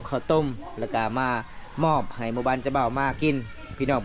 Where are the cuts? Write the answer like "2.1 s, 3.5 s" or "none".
none